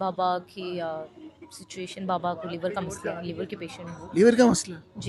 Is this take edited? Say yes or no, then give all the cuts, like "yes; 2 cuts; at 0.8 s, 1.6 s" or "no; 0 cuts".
no; 0 cuts